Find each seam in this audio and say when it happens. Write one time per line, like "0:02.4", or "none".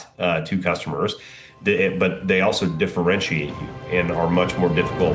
none